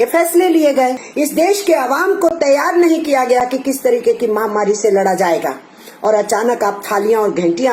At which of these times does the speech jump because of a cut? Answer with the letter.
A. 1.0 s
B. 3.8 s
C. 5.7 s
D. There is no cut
A